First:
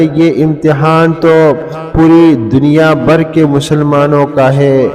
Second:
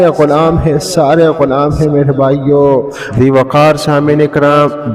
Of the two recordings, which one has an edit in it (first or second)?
second